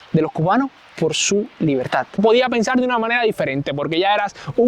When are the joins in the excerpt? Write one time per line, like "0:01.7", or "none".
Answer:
0:02.1

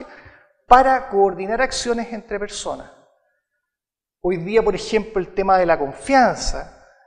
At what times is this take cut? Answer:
0:02.4

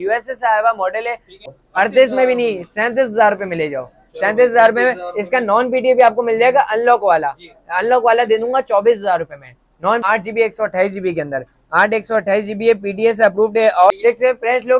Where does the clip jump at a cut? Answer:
0:01.5
0:10.0
0:13.9

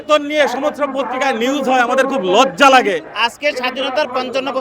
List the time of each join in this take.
0:03.1

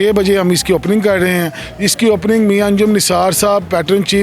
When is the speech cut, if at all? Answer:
none

